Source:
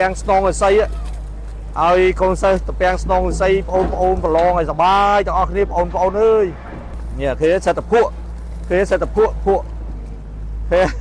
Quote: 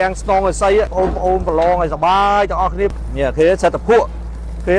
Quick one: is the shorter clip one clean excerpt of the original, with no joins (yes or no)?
no